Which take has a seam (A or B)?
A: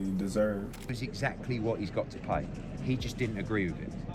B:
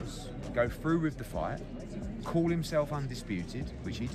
A